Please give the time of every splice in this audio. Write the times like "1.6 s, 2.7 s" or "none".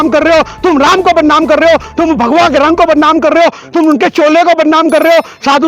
none